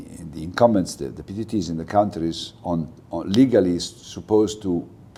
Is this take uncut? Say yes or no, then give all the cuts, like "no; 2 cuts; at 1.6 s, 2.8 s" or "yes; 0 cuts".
yes; 0 cuts